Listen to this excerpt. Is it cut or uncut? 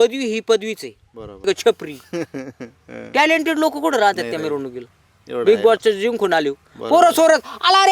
cut